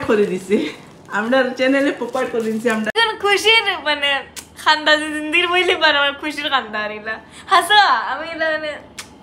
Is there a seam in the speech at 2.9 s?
yes; 1 cut; at 2.9 s

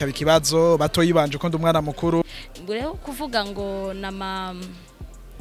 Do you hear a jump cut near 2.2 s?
yes; 1 cut; at 2.2 s

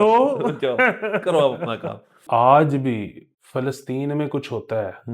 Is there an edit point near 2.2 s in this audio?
yes; 1 cut; at 2.2 s

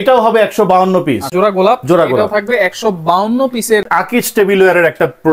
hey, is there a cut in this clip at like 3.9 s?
yes; 2 cuts; at 1.3 s, 3.9 s

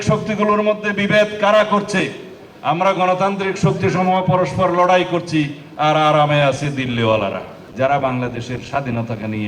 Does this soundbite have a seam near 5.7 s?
no; 2 cuts; at 2.3 s, 7.6 s

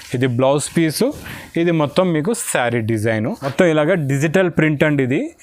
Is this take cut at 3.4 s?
yes; 1 cut; at 3.4 s

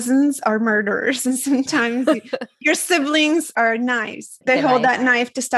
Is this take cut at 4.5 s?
yes; 1 cut; at 4.5 s

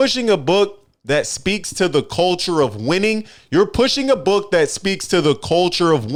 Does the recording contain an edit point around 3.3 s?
no; 0 cuts

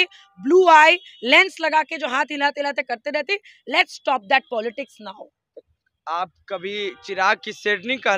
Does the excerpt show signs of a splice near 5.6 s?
no; 0 cuts

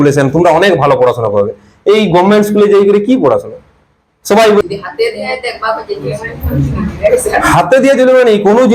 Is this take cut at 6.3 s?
no; 1 cut; at 4.6 s

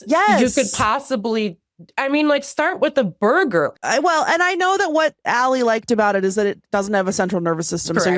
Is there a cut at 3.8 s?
yes; 1 cut; at 3.8 s

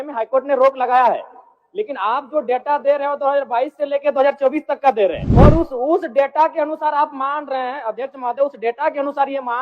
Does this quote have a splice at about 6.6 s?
no; 1 cut; at 5.2 s

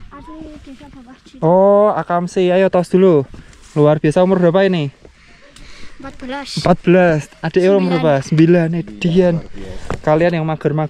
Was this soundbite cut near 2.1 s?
no; 0 cuts

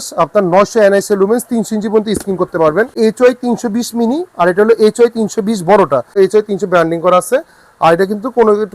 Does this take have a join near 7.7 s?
no; 2 cuts; at 2.9 s, 6.1 s

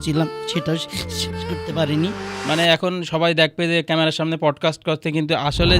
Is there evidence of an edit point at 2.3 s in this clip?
yes; 1 cut; at 2.3 s

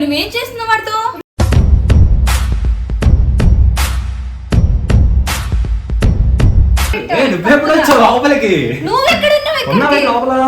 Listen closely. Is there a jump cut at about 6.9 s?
yes; 1 cut; at 6.9 s

